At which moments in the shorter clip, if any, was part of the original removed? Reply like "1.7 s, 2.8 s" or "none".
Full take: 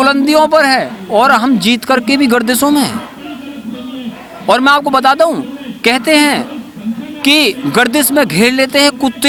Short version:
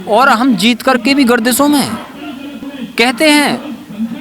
2.7 s